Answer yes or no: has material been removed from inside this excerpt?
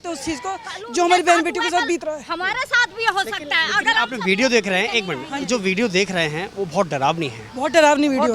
no